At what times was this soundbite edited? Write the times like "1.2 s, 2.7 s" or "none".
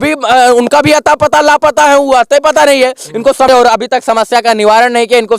3.5 s